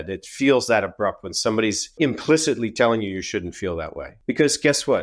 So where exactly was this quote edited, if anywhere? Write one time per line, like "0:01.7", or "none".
0:01.9
0:04.0